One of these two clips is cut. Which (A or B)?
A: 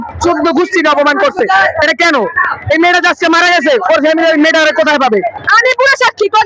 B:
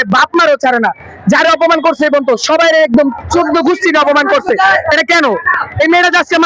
A